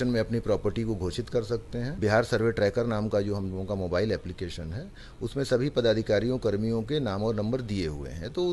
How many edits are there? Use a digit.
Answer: 1